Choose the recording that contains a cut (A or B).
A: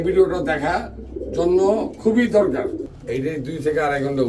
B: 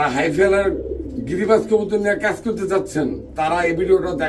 A